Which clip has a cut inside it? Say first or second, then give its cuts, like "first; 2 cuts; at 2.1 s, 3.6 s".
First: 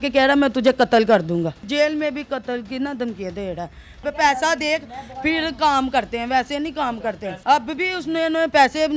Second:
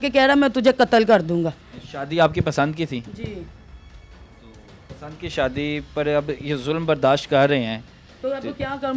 first; 3 cuts; at 1.7 s, 4.0 s, 7.3 s